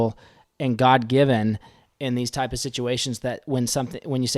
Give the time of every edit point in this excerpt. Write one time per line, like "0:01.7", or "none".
none